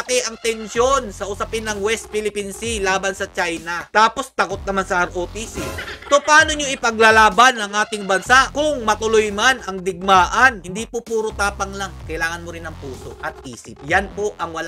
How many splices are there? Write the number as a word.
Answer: two